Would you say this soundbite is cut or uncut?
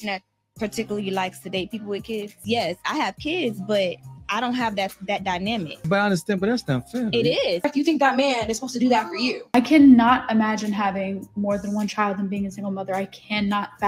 cut